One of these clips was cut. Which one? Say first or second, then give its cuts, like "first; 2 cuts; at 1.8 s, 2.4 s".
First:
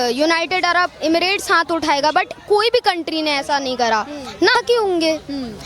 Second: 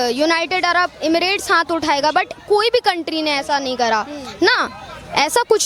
first; 1 cut; at 4.5 s